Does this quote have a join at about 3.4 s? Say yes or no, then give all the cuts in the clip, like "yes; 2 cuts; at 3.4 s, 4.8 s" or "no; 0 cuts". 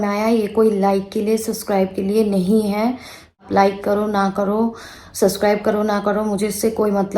yes; 1 cut; at 3.4 s